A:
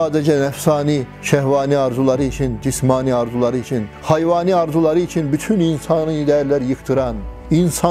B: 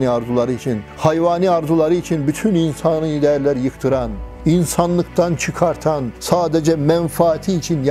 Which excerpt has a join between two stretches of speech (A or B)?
A